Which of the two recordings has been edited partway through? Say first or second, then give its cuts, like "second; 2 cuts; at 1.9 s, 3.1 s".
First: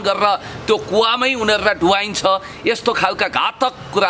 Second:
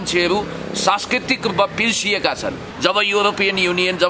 second; 1 cut; at 2.6 s